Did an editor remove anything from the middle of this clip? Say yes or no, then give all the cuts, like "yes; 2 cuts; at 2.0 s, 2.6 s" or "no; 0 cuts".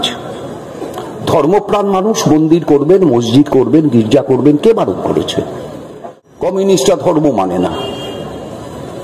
yes; 1 cut; at 5.9 s